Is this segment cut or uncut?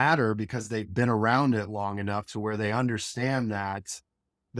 uncut